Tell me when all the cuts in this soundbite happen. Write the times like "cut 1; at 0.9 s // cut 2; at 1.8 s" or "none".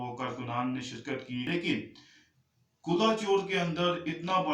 cut 1; at 1.5 s